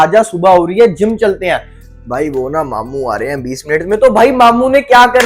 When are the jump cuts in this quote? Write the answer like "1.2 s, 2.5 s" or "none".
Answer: none